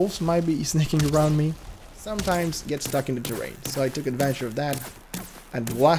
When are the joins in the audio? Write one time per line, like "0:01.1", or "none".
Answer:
0:02.1